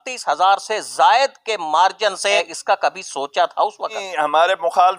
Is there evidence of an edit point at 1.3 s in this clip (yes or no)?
no